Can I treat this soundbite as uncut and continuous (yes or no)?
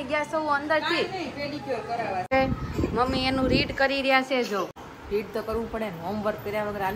no